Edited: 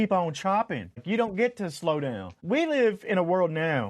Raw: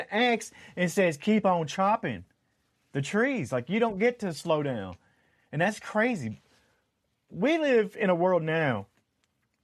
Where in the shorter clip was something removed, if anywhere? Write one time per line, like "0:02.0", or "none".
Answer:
0:01.0
0:02.3